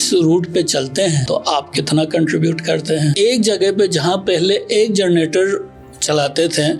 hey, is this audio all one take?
no; 2 cuts; at 1.2 s, 3.1 s

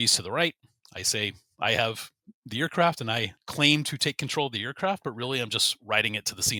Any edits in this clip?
no; 0 cuts

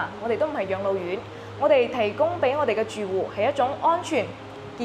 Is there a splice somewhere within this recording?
no; 0 cuts

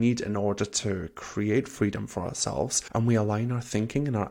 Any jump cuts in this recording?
yes; 1 cut; at 2.8 s

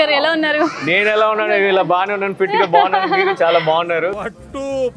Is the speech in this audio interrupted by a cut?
no; 0 cuts

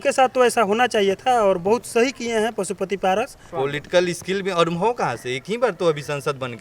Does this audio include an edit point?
yes; 1 cut; at 3.5 s

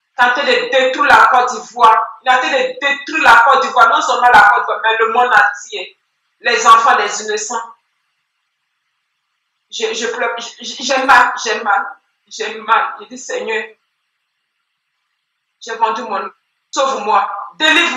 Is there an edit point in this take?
no; 0 cuts

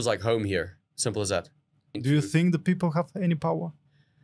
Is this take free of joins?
no; 1 cut; at 2.0 s

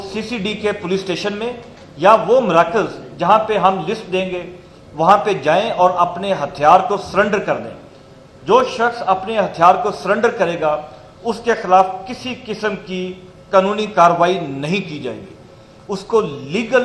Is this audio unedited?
yes; 0 cuts

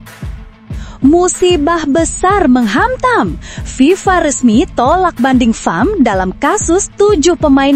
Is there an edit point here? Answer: yes; 1 cut; at 1.0 s

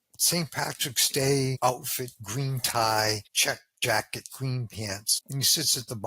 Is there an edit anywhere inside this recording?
yes; 3 cuts; at 1.6 s, 3.3 s, 5.1 s

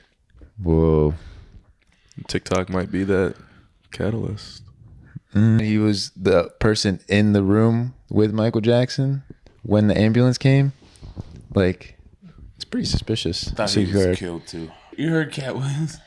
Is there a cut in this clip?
yes; 3 cuts; at 5.6 s, 13.5 s, 14.8 s

